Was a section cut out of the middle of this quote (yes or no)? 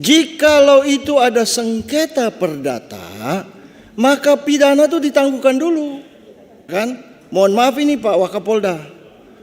yes